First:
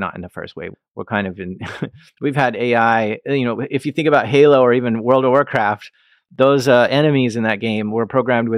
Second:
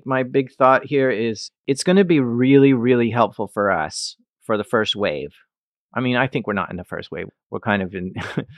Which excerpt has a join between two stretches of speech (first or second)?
second